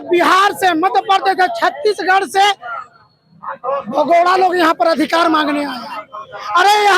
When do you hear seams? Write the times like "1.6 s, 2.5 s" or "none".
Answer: none